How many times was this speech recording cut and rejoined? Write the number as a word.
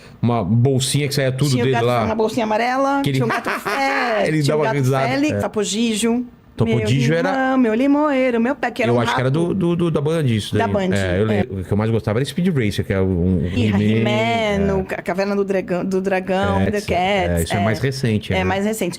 four